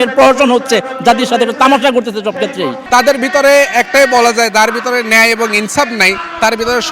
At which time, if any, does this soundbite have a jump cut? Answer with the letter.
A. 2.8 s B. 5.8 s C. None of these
A